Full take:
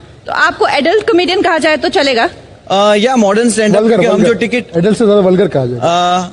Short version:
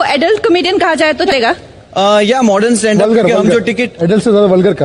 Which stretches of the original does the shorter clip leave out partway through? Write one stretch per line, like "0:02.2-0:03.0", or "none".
0:01.9-0:02.0